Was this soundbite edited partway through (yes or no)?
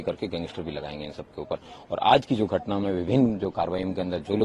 no